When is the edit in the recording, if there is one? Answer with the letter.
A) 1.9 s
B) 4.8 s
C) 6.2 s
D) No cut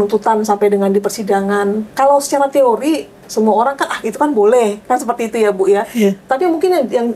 A